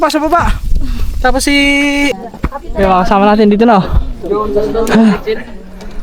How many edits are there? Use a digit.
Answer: 1